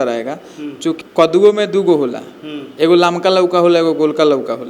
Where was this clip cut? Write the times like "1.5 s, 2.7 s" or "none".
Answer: 1.0 s